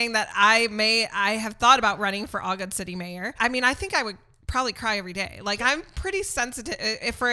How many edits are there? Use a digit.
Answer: 1